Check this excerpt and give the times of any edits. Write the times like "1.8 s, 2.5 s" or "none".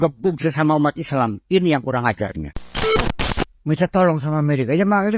3.0 s